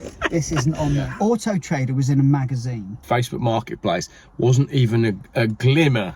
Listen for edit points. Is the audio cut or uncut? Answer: cut